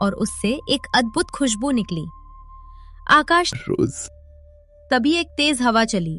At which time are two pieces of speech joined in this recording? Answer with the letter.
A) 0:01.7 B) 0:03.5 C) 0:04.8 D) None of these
B